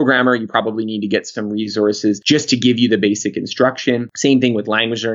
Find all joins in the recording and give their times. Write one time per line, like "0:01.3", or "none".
0:02.2
0:04.1